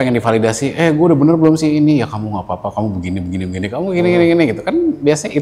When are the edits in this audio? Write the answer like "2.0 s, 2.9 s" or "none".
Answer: none